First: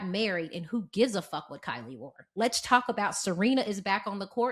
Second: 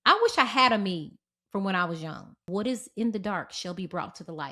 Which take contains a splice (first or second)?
second